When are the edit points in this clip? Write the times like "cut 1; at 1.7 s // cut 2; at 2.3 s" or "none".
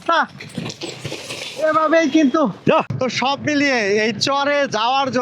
cut 1; at 2.9 s